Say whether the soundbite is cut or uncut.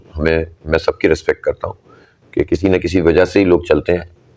uncut